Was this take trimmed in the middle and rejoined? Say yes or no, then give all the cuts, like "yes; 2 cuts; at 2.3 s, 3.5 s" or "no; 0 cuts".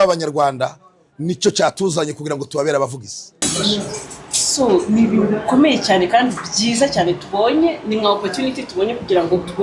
yes; 1 cut; at 3.4 s